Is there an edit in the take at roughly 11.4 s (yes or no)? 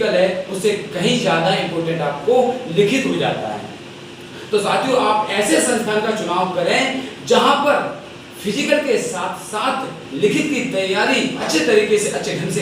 yes